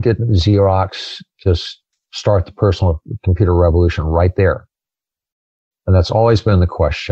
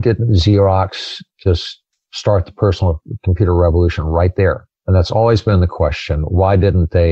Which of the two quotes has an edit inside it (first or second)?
second